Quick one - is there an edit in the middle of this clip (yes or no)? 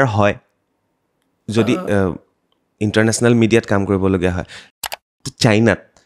yes